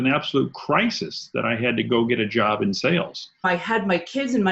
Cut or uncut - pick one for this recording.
cut